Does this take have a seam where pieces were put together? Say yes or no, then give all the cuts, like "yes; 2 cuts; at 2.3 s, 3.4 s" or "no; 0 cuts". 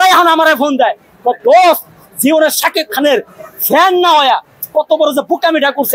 no; 0 cuts